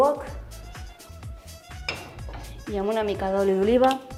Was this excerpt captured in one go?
yes; 0 cuts

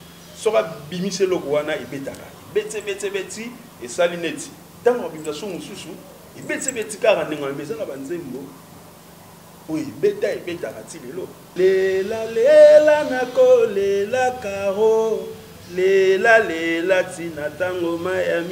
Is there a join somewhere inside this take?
yes; 1 cut; at 11.4 s

